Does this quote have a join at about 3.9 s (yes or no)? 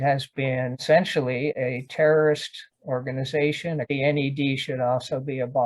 yes